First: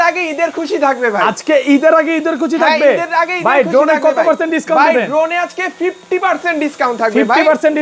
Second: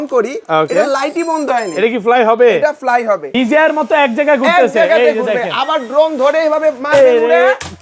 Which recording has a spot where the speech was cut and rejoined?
second; 1 cut; at 3.3 s

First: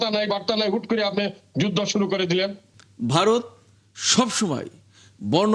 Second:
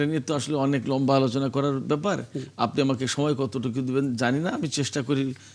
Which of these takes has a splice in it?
first; 1 cut; at 2.7 s

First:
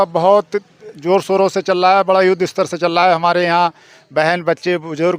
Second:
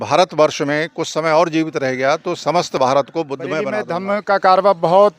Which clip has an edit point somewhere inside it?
second; 1 cut; at 3.8 s

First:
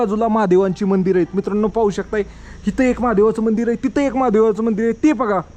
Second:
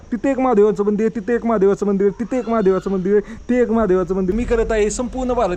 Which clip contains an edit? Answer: second; 1 cut; at 4.3 s

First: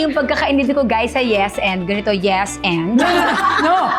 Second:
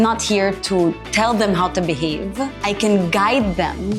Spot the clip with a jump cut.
second; 2 cuts; at 1.0 s, 2.5 s

